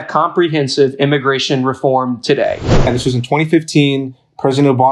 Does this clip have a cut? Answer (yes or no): yes